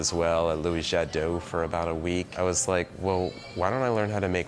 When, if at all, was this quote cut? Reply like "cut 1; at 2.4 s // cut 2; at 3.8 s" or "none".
cut 1; at 2.3 s